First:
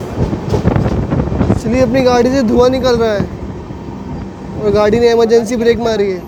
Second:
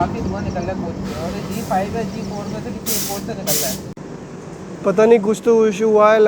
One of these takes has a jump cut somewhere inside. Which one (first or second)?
second